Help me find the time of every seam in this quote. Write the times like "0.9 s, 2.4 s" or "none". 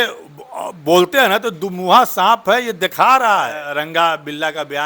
3.6 s